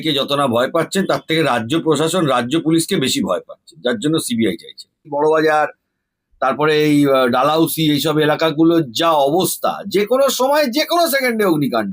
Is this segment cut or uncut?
cut